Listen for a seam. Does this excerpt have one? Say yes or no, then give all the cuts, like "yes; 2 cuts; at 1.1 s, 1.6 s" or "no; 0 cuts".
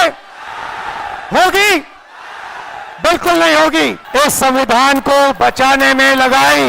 yes; 1 cut; at 4.0 s